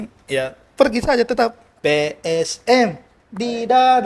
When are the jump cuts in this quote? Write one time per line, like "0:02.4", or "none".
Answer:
0:01.7